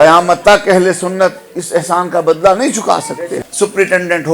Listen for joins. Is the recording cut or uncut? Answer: cut